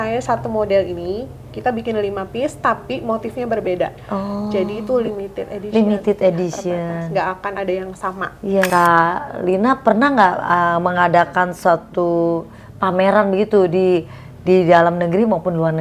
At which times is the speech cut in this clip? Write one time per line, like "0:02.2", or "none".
0:08.7